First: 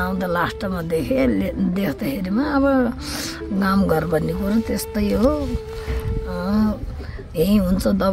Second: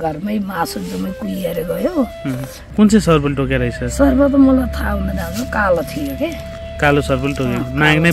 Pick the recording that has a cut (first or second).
second